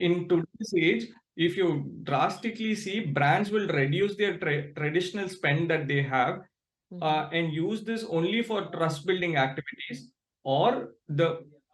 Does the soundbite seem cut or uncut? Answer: uncut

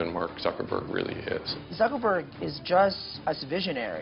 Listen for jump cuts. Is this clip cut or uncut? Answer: cut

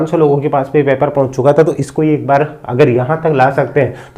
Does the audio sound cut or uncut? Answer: uncut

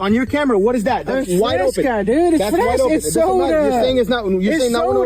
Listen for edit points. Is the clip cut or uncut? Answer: uncut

